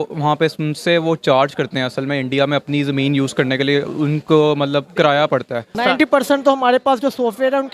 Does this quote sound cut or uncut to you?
cut